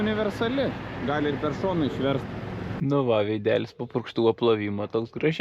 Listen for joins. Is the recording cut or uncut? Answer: cut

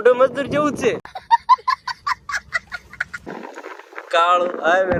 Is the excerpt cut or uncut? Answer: uncut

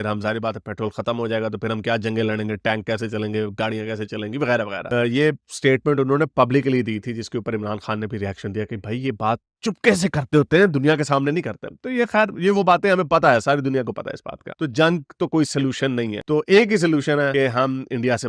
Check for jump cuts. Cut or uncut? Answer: uncut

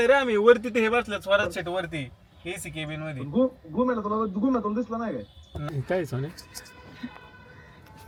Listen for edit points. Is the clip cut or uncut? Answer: uncut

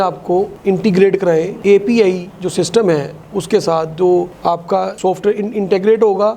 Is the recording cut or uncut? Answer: uncut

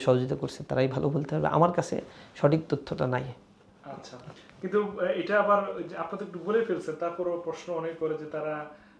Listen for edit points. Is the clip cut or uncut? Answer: uncut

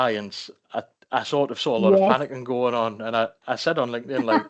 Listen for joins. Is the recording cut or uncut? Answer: uncut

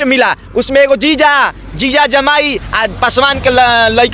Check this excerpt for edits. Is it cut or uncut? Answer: uncut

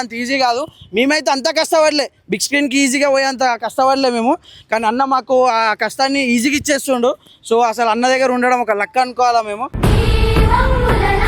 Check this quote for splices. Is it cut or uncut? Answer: uncut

